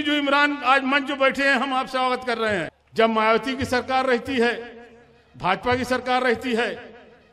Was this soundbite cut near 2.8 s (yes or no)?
yes